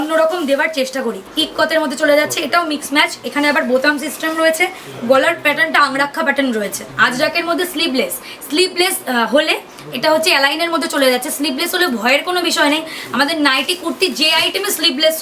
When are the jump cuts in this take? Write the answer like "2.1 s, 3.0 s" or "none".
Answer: 1.2 s, 6.9 s